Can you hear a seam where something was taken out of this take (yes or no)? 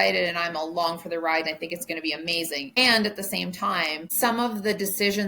yes